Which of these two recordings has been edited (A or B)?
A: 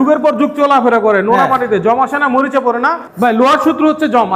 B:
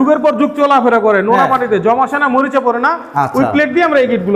A